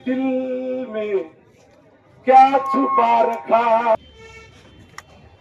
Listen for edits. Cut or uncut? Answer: cut